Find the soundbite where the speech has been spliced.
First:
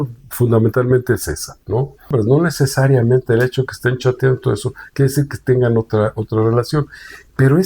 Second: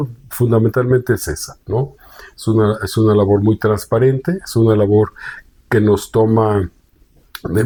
first; 1 cut; at 2.1 s

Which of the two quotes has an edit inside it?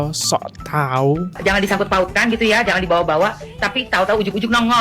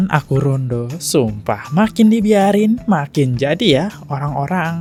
first; 1 cut; at 1.3 s

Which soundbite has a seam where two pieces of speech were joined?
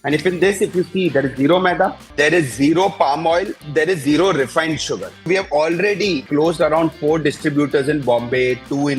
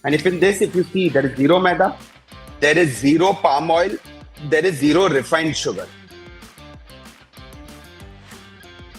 first; 4 cuts; at 2.0 s, 3.6 s, 5.3 s, 6.2 s

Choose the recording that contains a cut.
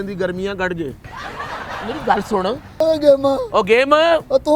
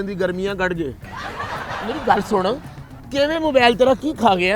first; 1 cut; at 2.8 s

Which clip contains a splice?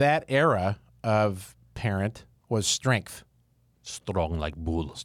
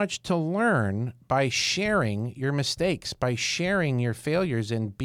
first; 1 cut; at 2.3 s

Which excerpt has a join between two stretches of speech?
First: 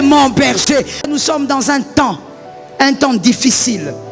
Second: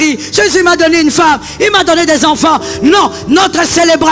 first; 1 cut; at 1.0 s

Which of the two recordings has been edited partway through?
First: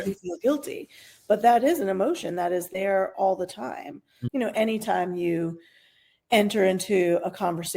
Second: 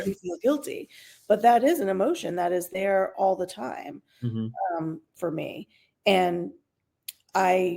first; 1 cut; at 4.1 s

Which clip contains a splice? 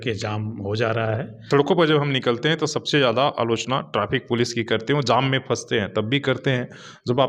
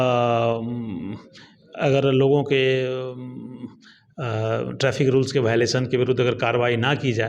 first; 1 cut; at 1.3 s

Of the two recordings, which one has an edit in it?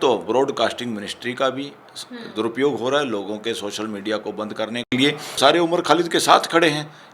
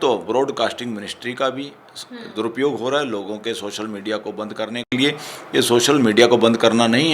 first; 1 cut; at 5.4 s

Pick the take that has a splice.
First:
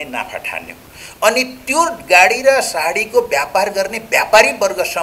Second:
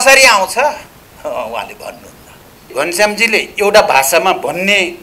second; 1 cut; at 2.7 s

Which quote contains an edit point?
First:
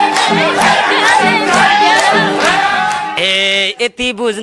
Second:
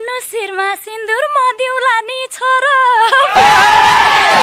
first; 1 cut; at 3.1 s

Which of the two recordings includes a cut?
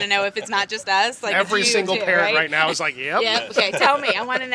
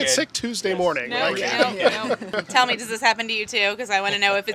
second; 1 cut; at 2.3 s

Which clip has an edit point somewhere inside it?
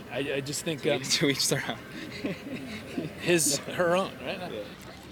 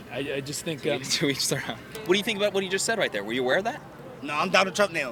second; 1 cut; at 1.9 s

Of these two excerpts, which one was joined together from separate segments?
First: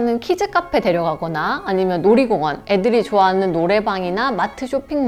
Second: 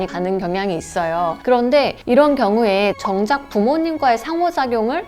second; 1 cut; at 3.0 s

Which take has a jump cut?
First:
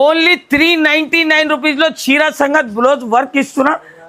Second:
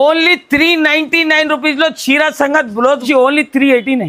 second; 1 cut; at 3.0 s

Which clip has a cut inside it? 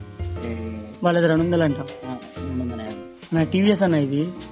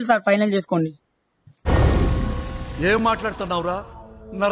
second; 1 cut; at 0.9 s

